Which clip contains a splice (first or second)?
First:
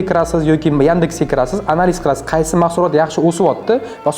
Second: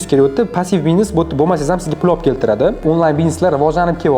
second